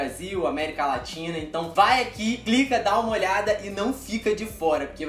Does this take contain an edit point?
no; 0 cuts

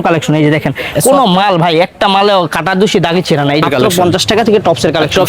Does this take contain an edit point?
yes; 1 cut; at 3.6 s

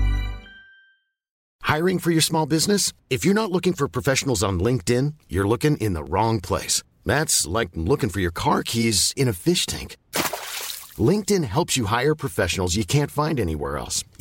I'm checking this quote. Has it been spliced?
yes; 1 cut; at 1.4 s

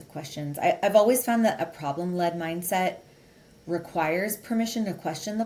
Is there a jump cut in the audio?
no; 0 cuts

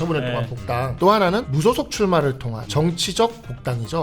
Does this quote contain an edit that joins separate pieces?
yes; 3 cuts; at 0.9 s, 1.5 s, 2.5 s

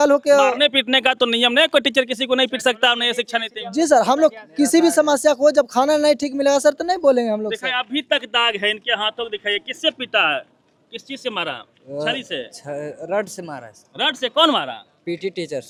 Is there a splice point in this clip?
no; 0 cuts

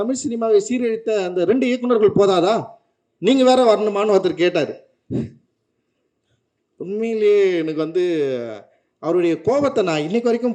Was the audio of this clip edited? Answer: no; 0 cuts

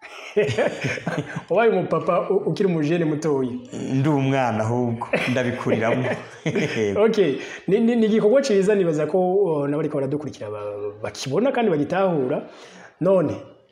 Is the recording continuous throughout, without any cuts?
yes; 0 cuts

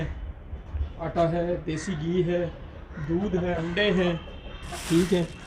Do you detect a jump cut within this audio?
yes; 1 cut; at 3.6 s

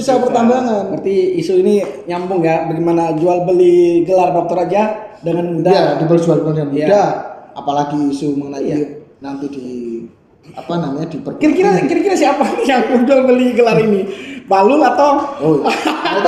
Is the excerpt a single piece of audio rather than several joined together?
yes; 0 cuts

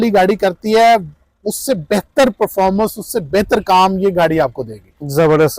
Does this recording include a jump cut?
no; 0 cuts

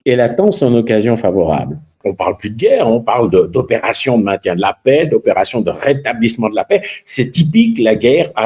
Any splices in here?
yes; 1 cut; at 2.1 s

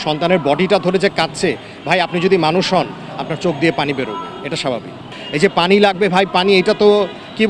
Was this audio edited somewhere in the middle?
yes; 1 cut; at 5.1 s

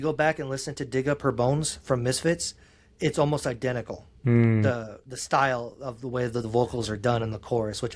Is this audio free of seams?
yes; 0 cuts

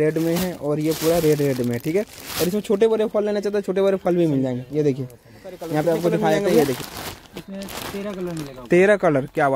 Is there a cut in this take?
yes; 1 cut; at 6.9 s

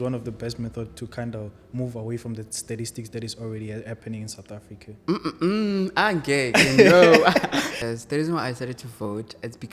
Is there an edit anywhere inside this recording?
yes; 1 cut; at 7.7 s

